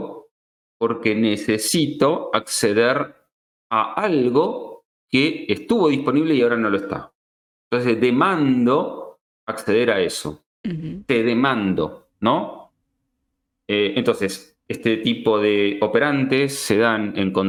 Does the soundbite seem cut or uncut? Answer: uncut